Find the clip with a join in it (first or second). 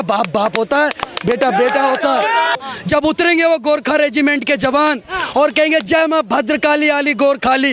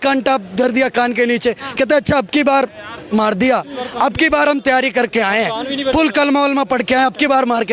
first